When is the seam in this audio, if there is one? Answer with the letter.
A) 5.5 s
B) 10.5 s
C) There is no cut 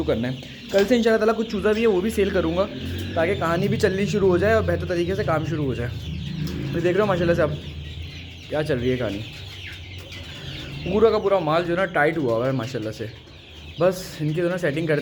C